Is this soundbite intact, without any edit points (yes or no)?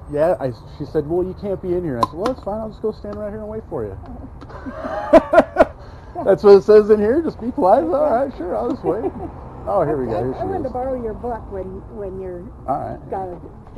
yes